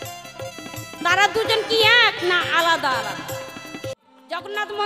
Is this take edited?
yes; 1 cut; at 3.9 s

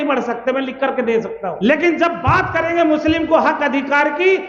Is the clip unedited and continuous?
yes; 0 cuts

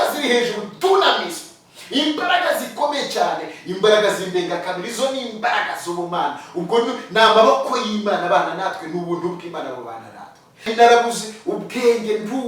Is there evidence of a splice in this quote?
yes; 1 cut; at 10.7 s

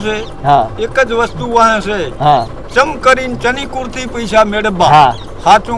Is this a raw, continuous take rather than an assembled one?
yes; 0 cuts

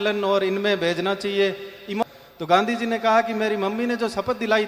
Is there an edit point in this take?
yes; 1 cut; at 2.0 s

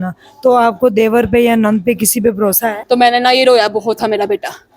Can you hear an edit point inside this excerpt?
yes; 1 cut; at 2.7 s

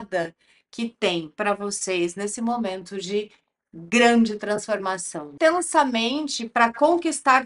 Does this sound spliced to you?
yes; 1 cut; at 5.3 s

